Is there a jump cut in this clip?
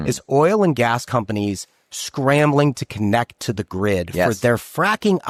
no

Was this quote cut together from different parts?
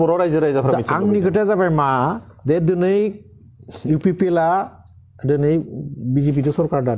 no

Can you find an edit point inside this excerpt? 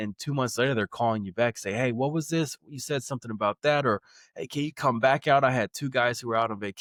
no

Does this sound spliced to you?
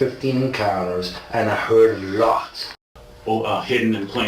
yes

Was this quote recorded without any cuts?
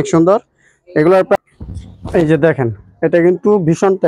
no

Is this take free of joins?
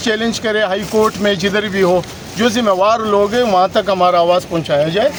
yes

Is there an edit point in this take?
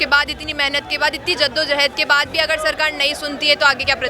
no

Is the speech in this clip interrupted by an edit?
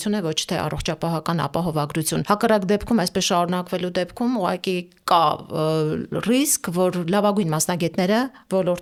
no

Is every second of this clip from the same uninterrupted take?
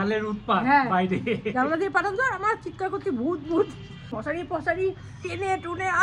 no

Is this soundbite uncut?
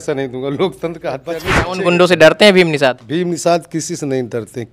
no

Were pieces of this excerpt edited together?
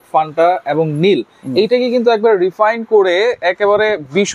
no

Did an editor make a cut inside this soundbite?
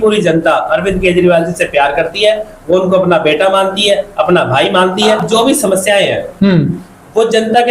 yes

